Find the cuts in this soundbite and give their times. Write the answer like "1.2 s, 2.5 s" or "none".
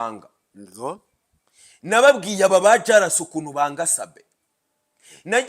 none